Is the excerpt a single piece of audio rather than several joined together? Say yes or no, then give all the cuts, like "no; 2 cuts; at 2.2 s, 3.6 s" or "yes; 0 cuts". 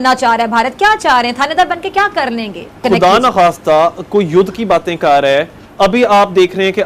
no; 1 cut; at 2.6 s